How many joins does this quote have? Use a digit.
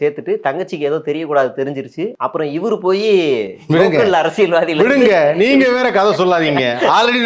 1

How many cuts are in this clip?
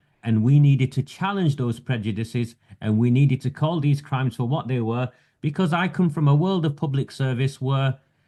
0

